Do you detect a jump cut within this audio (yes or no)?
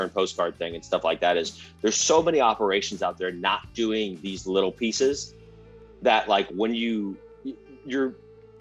no